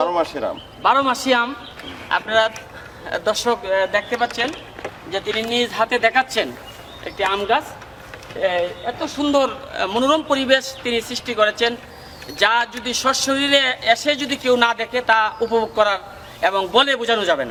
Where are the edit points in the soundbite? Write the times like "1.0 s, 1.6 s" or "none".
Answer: none